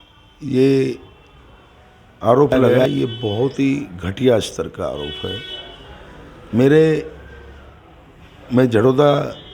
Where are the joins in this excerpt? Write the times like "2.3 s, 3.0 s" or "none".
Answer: 2.9 s